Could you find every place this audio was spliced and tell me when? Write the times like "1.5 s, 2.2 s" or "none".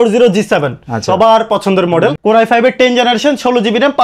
2.2 s